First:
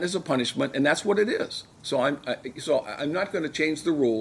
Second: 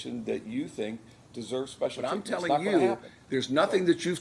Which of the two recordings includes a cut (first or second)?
second